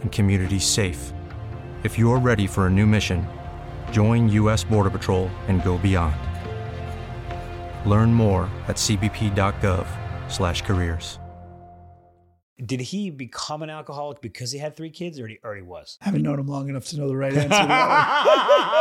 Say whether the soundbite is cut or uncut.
cut